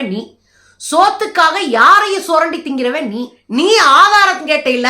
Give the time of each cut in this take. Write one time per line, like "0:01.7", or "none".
0:03.4